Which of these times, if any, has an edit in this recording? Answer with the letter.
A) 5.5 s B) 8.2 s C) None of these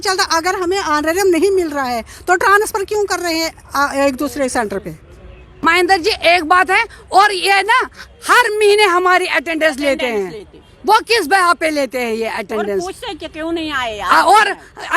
A